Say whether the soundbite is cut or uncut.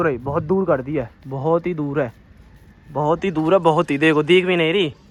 uncut